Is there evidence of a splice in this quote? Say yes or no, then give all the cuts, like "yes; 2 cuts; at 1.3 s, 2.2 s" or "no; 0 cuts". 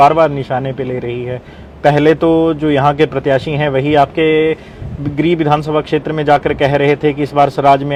no; 0 cuts